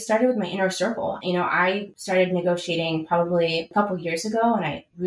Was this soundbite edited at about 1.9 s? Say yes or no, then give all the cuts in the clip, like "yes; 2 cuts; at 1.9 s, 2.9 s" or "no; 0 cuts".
yes; 2 cuts; at 1.9 s, 3.7 s